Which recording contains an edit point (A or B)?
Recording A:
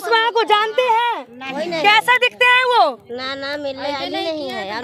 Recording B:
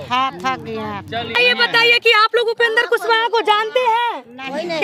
B